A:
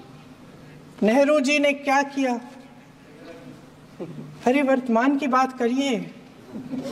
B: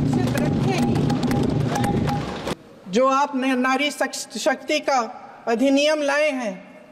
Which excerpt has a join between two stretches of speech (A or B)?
B